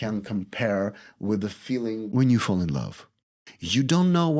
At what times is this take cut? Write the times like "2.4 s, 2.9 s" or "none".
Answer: 2.0 s, 3.1 s